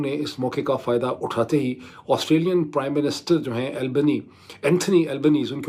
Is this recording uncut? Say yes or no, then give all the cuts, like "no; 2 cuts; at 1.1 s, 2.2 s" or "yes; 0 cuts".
yes; 0 cuts